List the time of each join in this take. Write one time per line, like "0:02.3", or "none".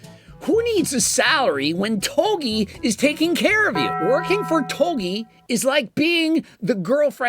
0:03.9